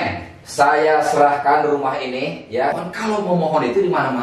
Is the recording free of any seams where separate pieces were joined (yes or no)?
no